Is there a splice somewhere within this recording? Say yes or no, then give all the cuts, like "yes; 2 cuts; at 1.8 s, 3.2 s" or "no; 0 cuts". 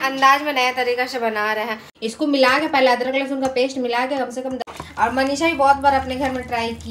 yes; 2 cuts; at 1.9 s, 4.7 s